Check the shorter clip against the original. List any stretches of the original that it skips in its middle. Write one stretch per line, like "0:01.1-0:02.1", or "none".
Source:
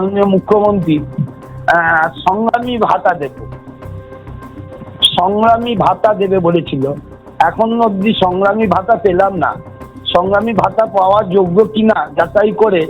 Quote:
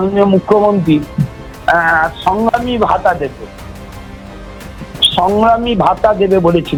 none